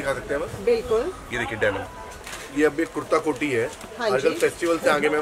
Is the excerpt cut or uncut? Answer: cut